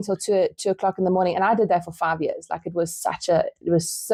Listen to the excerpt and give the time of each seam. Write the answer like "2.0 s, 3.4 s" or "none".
none